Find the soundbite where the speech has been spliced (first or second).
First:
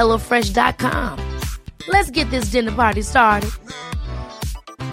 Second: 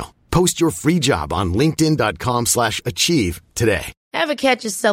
second